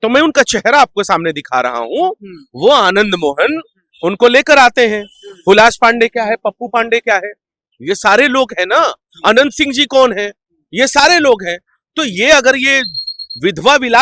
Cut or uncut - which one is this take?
uncut